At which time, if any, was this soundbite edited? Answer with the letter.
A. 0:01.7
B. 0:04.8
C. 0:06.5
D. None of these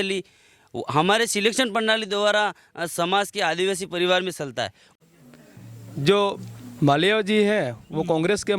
B